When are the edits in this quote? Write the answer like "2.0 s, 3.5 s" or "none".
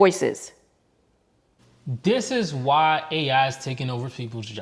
1.6 s